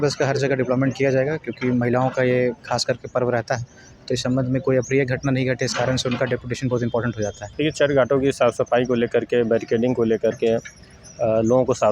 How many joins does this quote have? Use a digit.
1